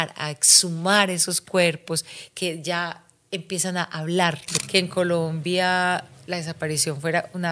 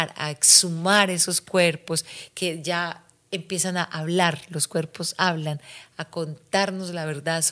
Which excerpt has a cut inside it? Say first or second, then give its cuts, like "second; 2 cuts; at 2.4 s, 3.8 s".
first; 1 cut; at 4.5 s